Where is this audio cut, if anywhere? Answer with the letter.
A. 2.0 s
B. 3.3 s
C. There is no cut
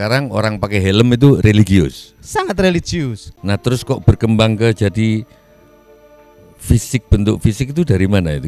B